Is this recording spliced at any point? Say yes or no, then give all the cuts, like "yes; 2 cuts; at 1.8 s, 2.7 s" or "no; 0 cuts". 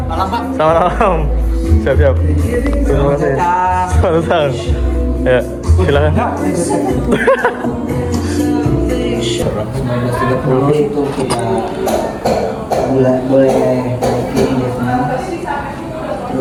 no; 0 cuts